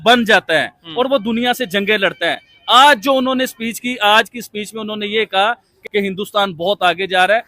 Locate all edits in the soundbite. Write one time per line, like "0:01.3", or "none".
0:05.8